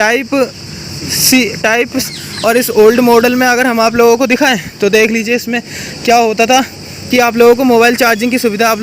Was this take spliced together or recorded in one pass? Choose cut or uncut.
cut